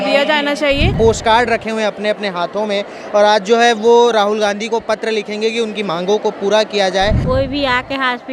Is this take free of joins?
no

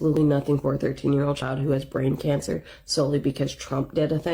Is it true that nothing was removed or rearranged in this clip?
yes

